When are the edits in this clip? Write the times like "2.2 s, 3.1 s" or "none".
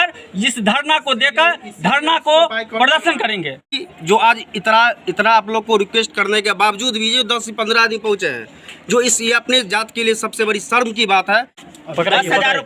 3.9 s, 11.6 s